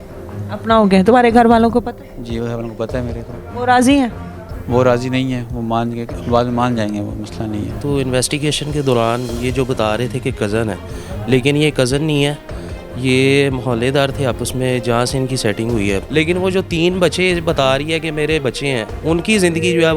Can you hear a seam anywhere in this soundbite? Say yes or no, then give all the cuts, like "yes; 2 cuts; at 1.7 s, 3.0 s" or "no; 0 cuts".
yes; 2 cuts; at 7.8 s, 16.0 s